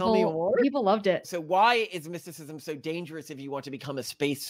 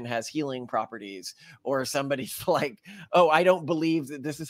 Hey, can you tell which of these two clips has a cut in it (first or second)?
first